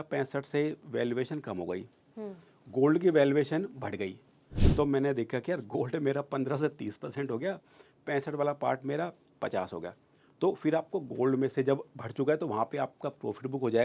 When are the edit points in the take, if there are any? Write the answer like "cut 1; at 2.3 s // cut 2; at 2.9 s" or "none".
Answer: none